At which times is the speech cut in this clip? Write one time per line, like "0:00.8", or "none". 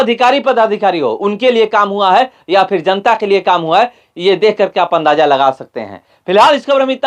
none